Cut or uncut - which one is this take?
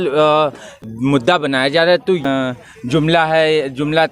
cut